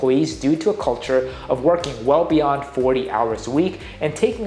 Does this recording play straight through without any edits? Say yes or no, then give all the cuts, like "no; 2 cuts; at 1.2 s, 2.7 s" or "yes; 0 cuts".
yes; 0 cuts